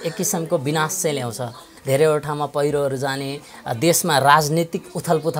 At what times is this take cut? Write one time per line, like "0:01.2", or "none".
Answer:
0:01.7

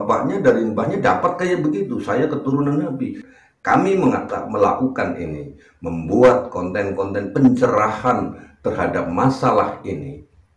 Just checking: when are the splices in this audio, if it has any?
0:03.2

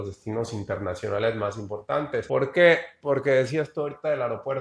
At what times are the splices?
0:02.2

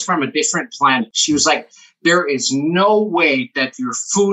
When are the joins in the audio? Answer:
0:01.1

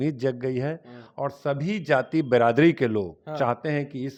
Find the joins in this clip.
none

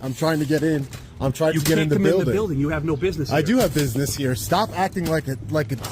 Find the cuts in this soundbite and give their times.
0:04.4

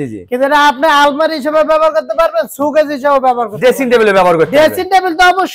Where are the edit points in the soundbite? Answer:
none

